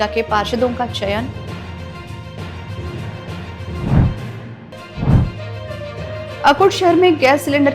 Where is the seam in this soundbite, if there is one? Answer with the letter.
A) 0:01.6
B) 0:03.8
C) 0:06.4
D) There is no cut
D